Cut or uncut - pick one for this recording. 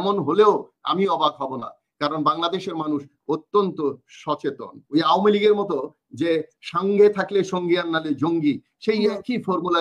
cut